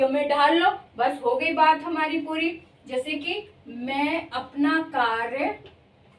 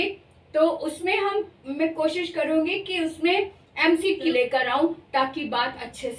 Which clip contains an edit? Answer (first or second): second